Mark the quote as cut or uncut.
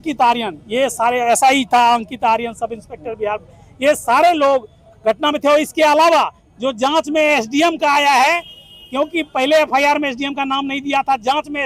uncut